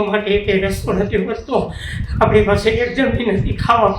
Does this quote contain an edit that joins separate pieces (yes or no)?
no